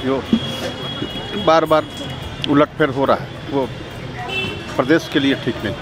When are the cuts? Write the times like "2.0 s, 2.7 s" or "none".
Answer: none

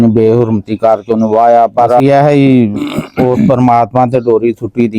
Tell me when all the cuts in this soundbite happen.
2.0 s

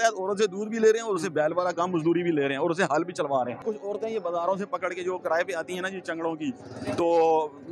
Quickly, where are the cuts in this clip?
3.5 s

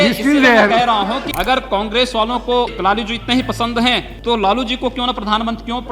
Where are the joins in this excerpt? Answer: 1.3 s, 2.7 s, 4.1 s

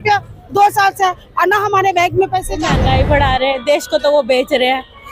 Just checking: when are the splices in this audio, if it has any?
2.7 s

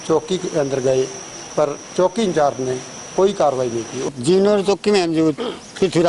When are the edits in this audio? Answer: 4.1 s

